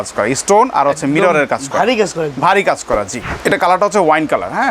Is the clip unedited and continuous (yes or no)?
no